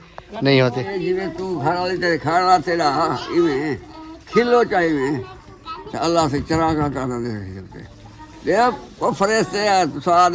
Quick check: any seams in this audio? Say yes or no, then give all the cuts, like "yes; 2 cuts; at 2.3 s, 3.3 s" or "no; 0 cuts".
yes; 1 cut; at 0.9 s